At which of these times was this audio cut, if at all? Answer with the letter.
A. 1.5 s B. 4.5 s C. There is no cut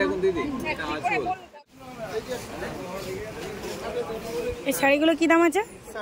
A